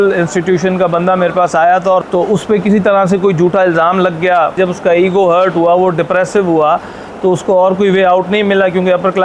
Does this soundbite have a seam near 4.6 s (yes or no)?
yes